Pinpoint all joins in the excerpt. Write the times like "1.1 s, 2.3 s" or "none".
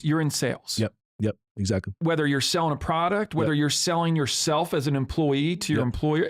1.9 s